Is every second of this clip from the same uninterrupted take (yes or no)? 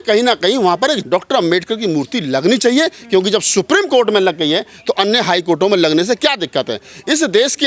no